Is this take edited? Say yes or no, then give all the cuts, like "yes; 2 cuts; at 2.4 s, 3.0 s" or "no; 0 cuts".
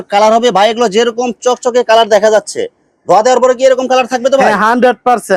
no; 0 cuts